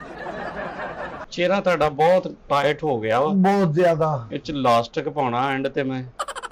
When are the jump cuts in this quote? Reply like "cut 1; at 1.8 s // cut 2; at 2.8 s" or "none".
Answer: cut 1; at 1.2 s